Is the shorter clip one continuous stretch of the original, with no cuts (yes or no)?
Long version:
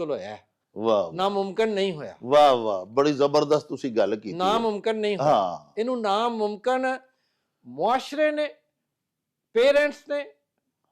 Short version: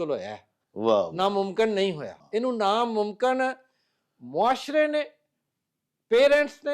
no